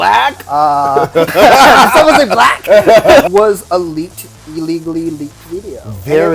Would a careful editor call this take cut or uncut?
cut